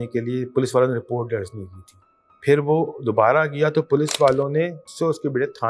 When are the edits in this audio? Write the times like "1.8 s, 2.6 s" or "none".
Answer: none